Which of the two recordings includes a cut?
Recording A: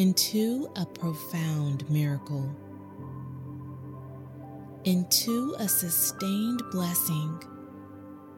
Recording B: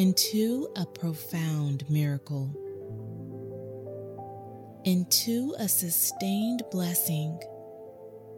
B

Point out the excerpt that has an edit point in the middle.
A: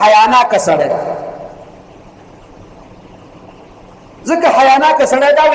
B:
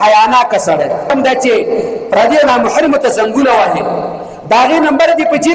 B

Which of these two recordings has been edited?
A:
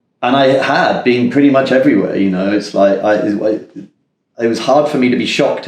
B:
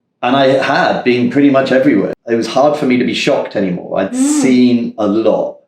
B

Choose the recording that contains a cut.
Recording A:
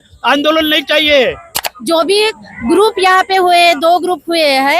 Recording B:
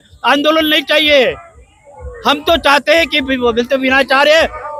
A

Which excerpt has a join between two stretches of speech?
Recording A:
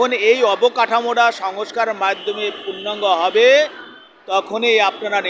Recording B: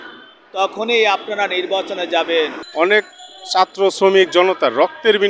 B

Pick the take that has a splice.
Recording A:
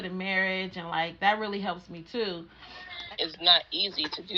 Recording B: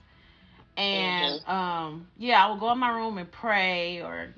A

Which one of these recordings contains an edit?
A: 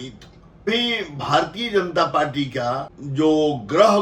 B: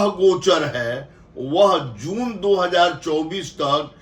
A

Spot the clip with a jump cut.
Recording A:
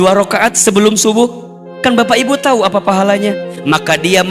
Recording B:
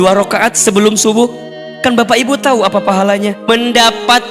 B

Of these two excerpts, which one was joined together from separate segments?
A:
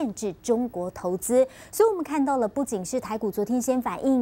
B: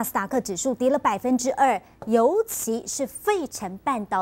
B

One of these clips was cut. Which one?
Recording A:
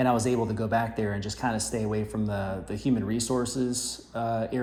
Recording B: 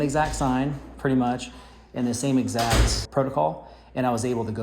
B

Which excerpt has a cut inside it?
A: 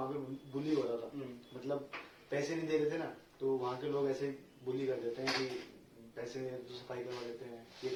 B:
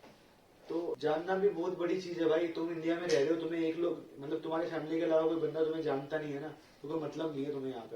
B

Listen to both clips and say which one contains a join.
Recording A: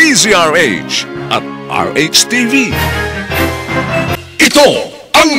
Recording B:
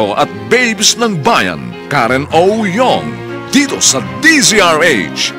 A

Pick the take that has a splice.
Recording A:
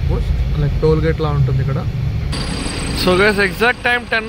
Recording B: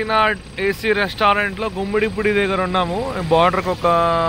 A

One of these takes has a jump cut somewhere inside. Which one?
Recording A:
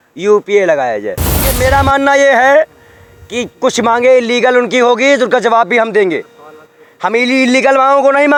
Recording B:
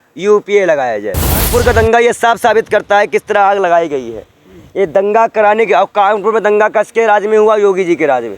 B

